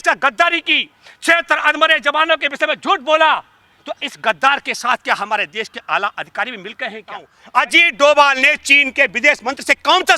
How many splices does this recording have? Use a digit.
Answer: 1